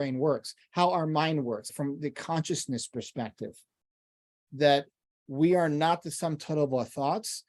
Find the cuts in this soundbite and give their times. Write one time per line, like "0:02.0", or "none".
0:01.7
0:04.4